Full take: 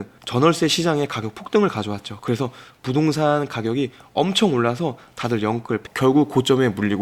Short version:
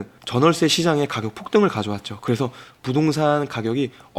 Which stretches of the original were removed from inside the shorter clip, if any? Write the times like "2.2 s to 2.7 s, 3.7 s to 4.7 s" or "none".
none